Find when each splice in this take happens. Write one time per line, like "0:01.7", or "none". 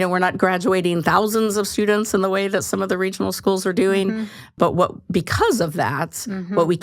0:04.5